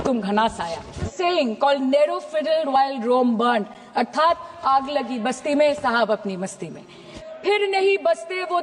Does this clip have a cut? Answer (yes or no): yes